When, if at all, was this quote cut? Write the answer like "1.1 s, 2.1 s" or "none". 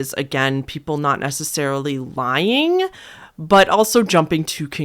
none